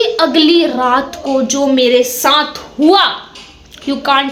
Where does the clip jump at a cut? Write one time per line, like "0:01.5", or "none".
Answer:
none